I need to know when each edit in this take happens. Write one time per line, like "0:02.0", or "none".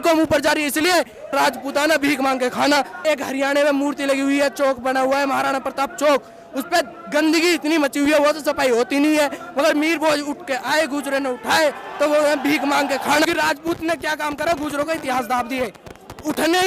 0:01.3
0:03.0
0:13.3